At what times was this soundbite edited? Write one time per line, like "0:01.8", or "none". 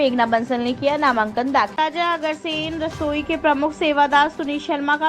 0:01.7